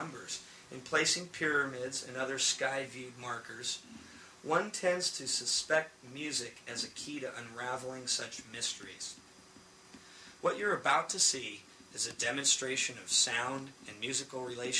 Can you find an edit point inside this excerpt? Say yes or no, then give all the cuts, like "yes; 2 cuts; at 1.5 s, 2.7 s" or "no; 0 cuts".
yes; 1 cut; at 11.7 s